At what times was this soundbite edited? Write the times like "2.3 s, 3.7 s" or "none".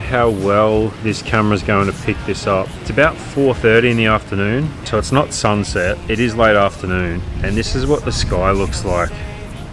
1.0 s, 2.8 s, 6.0 s, 7.4 s